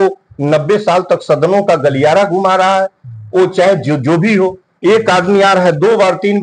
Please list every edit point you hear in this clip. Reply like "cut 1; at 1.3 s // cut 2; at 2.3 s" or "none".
none